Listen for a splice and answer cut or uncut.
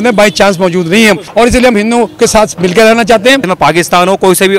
cut